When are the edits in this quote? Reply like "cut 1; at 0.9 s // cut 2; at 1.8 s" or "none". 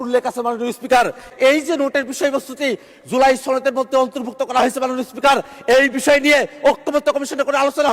cut 1; at 1.3 s